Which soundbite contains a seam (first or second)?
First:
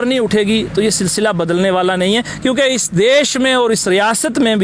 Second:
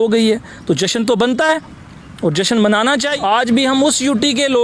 second